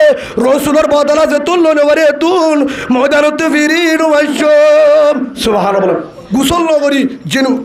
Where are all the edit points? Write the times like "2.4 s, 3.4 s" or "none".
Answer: 6.2 s